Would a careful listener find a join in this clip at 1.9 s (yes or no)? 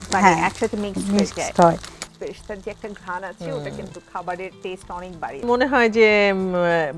yes